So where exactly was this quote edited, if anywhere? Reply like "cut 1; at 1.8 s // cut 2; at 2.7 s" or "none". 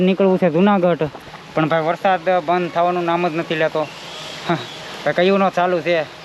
none